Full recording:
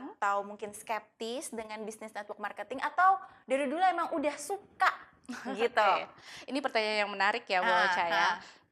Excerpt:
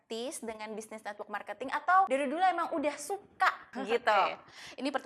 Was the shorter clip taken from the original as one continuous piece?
no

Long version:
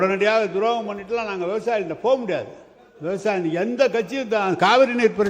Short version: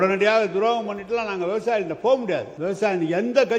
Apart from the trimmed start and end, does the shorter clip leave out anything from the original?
yes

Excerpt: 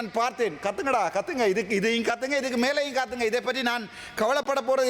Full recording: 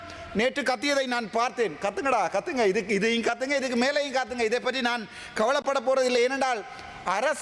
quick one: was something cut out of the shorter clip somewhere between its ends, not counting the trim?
no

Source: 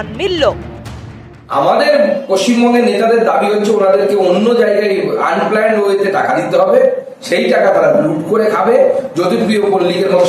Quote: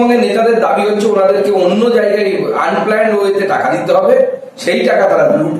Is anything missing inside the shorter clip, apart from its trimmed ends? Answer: no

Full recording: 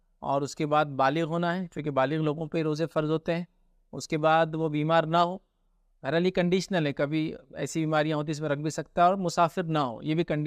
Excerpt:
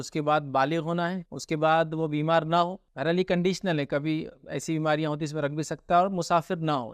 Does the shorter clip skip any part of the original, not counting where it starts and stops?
yes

